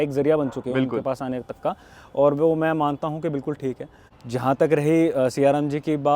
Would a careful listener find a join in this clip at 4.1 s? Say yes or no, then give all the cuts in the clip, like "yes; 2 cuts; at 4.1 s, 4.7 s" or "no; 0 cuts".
yes; 1 cut; at 4.1 s